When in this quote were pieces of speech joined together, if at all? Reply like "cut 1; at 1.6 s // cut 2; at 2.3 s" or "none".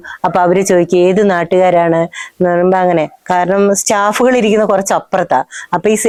none